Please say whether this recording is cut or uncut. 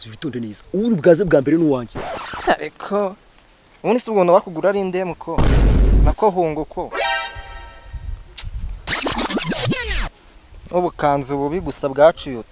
uncut